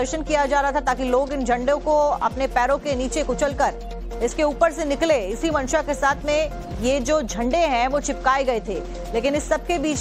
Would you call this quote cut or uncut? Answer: cut